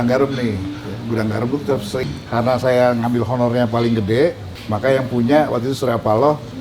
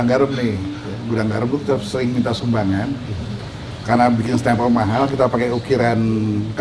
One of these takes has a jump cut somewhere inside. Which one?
first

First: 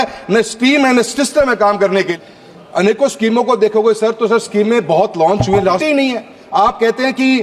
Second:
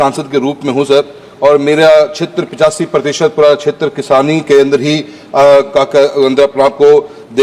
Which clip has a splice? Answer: first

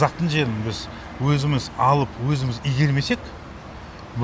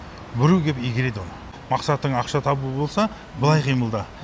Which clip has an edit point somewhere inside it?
second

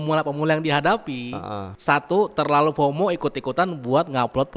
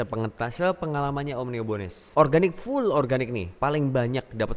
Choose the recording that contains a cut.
second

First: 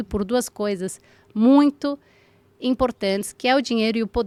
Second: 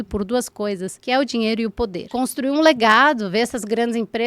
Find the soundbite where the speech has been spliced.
second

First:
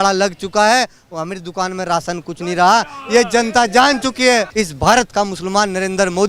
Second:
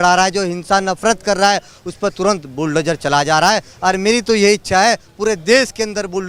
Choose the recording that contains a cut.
first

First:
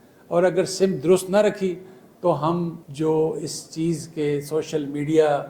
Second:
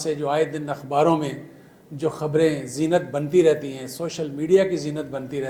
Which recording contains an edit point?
first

